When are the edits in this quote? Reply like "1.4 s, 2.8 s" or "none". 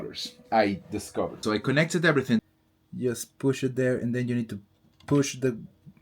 1.4 s, 2.4 s